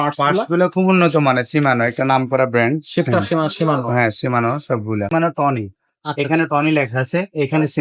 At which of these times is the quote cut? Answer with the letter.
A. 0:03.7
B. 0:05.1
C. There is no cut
B